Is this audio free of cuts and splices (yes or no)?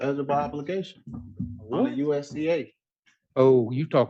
yes